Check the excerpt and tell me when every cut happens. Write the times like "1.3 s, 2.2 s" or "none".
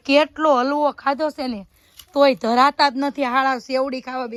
none